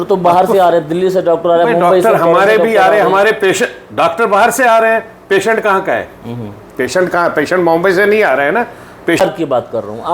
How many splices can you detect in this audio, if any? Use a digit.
1